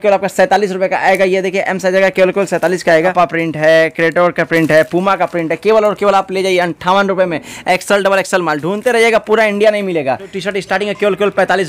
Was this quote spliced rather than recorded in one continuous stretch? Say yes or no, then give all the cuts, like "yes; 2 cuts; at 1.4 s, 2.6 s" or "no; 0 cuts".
yes; 2 cuts; at 3.0 s, 10.3 s